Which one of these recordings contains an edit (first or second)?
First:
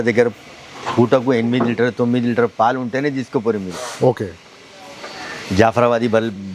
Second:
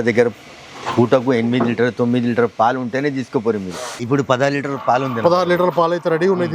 second